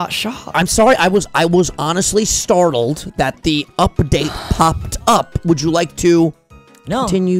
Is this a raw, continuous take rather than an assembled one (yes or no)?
yes